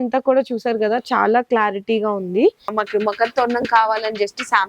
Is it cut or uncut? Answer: cut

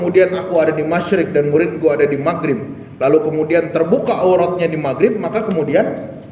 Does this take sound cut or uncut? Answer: uncut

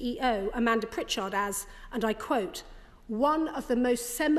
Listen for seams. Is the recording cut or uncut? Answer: uncut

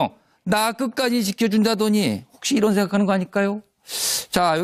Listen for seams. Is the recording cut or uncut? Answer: uncut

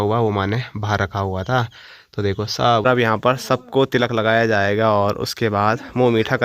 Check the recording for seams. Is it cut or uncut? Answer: cut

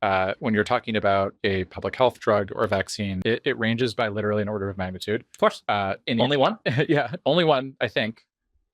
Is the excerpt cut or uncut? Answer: cut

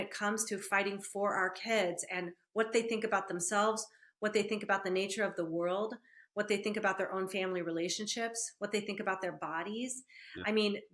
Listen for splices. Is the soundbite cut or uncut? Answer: uncut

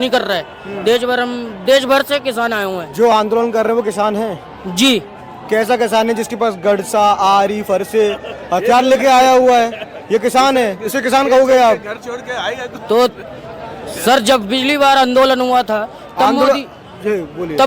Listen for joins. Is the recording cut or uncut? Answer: uncut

